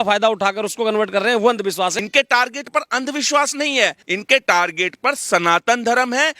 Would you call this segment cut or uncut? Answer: cut